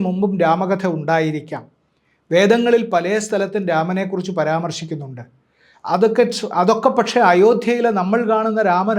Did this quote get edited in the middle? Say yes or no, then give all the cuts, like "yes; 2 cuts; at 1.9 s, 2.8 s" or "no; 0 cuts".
no; 0 cuts